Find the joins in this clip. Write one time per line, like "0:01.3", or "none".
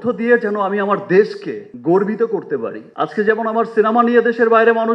0:02.8